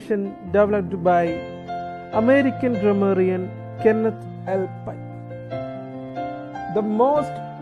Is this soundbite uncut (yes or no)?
no